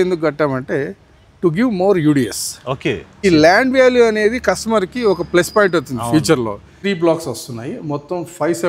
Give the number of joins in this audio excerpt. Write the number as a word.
one